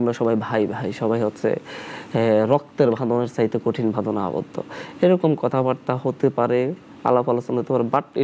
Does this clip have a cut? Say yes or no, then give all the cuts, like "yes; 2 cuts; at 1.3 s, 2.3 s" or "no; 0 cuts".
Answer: no; 0 cuts